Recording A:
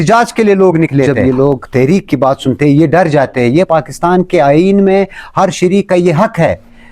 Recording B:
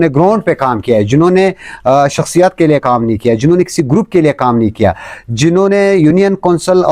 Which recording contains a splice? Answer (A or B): A